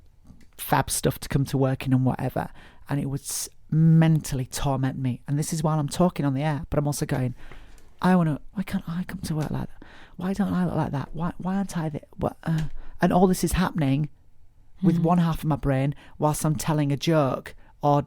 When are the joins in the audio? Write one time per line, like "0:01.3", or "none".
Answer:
0:06.6
0:08.5
0:10.1